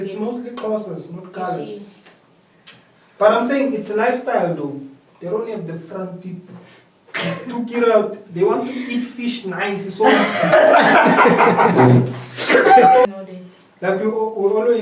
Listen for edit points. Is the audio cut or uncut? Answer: cut